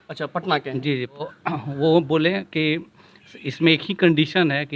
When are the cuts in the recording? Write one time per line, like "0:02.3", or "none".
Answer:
0:01.3